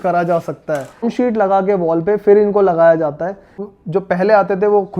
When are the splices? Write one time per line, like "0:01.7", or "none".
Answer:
0:01.0
0:03.7